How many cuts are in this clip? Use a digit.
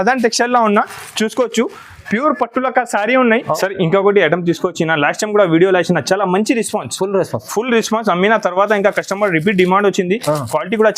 1